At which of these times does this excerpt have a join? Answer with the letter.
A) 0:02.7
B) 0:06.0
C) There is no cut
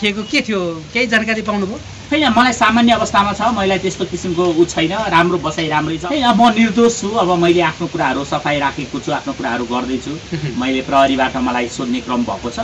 B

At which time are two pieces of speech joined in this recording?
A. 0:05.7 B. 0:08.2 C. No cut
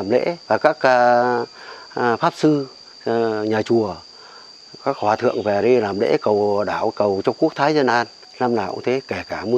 B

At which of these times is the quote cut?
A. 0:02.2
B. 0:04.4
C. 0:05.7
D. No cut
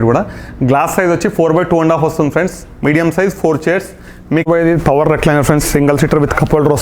B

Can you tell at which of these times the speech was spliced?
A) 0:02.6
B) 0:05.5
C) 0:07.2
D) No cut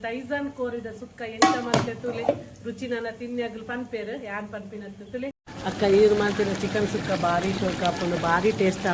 B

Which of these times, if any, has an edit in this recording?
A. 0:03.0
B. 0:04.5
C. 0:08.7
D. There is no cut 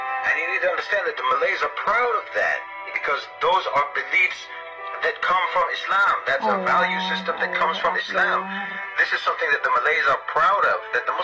D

